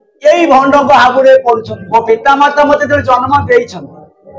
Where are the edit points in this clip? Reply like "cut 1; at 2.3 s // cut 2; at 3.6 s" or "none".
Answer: cut 1; at 1.8 s

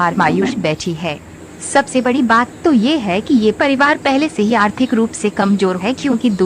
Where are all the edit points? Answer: cut 1; at 4.8 s

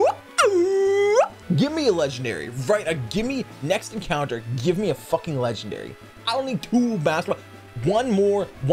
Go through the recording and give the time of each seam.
cut 1; at 1.4 s

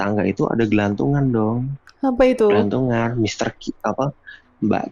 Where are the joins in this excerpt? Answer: none

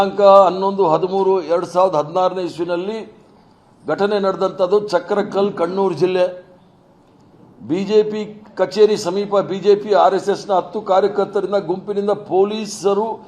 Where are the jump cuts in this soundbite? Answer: none

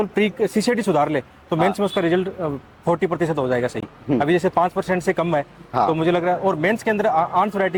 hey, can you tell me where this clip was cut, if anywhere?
none

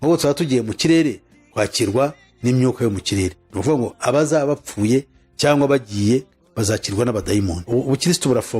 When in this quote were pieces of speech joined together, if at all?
cut 1; at 7.6 s

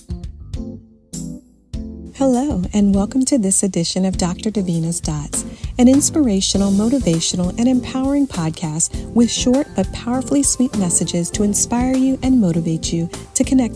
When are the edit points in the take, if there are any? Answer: none

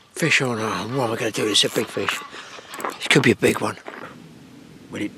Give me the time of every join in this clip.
cut 1; at 4.0 s

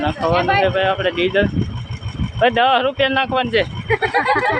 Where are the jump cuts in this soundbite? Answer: none

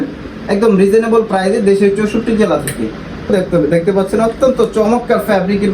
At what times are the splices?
cut 1; at 3.3 s

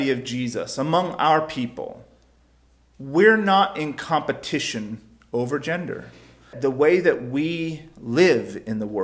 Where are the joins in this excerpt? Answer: cut 1; at 6.5 s

